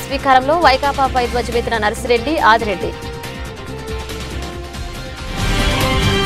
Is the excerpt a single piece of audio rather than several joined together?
yes; 0 cuts

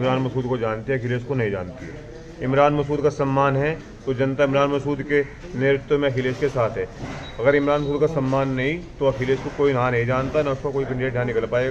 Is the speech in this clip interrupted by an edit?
no; 0 cuts

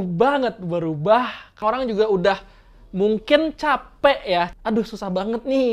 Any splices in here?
yes; 2 cuts; at 1.6 s, 4.5 s

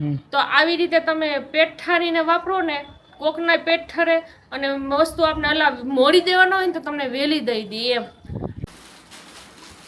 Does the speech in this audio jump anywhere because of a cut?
yes; 1 cut; at 8.5 s

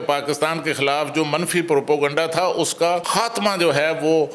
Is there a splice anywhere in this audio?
yes; 1 cut; at 3.0 s

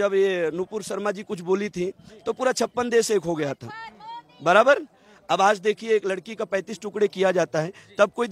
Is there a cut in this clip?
no; 0 cuts

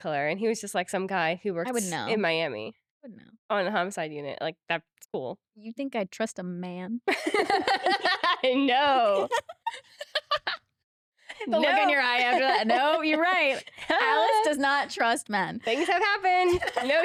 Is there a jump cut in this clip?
no; 0 cuts

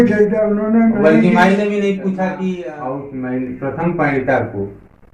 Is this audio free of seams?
no; 1 cut; at 2.7 s

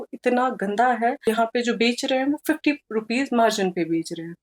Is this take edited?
yes; 1 cut; at 1.3 s

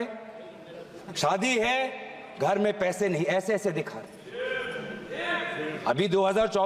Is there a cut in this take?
no; 0 cuts

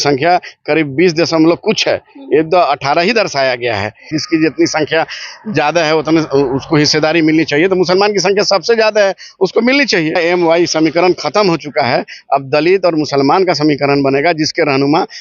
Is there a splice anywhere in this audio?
yes; 2 cuts; at 4.1 s, 10.2 s

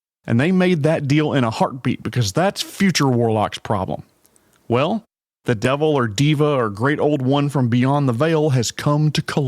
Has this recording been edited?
no; 0 cuts

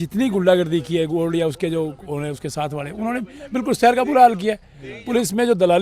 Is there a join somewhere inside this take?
no; 0 cuts

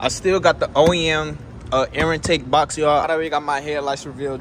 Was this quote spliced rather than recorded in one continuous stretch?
yes; 1 cut; at 3.0 s

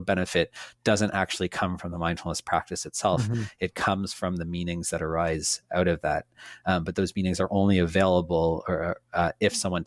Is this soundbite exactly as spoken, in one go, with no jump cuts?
yes; 0 cuts

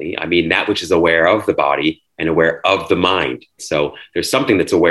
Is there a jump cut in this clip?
yes; 1 cut; at 3.5 s

